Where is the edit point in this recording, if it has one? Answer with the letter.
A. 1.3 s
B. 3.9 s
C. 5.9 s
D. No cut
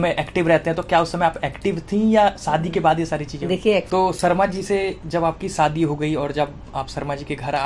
B